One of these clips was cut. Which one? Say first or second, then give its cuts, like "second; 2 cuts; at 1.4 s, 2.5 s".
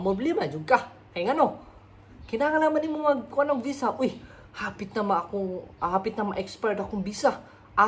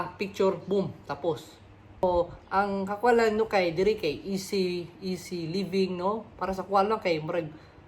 second; 1 cut; at 2.0 s